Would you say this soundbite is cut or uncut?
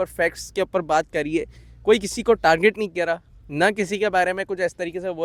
uncut